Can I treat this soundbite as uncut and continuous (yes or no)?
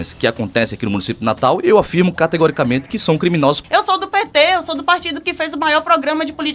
no